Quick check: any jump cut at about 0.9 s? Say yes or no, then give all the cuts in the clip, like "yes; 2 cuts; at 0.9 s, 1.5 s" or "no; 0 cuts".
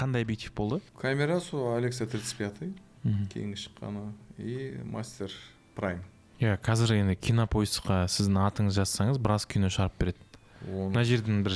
yes; 2 cuts; at 0.9 s, 6.2 s